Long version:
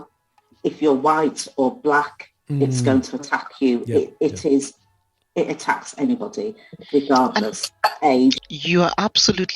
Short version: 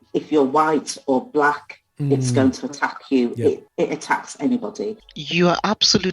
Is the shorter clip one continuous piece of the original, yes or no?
no